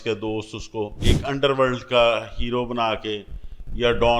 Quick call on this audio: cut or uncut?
cut